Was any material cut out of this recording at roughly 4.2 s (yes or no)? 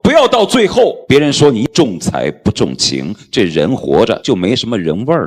yes